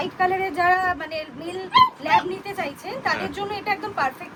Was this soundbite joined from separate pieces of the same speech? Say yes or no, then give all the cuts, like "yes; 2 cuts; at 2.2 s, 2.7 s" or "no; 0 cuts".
no; 0 cuts